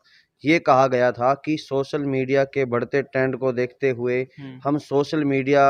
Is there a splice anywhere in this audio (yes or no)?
no